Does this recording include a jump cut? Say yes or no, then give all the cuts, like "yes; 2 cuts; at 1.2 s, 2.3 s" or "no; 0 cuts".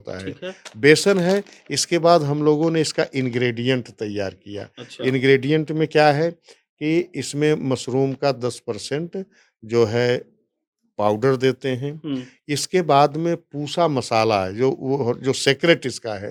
no; 0 cuts